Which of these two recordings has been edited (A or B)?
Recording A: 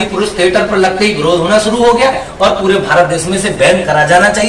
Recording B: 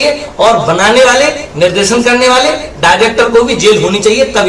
A